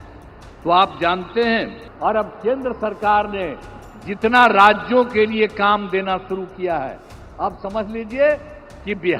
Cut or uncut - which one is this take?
cut